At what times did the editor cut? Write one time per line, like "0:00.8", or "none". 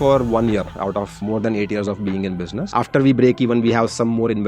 0:01.1
0:02.6